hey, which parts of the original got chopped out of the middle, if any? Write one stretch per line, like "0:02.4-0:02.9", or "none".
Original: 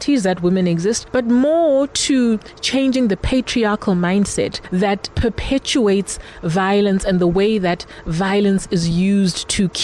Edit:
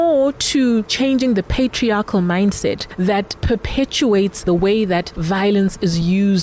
0:02.4-0:02.6
0:06.2-0:07.2
0:07.9-0:08.0